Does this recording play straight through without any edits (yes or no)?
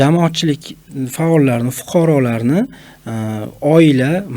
yes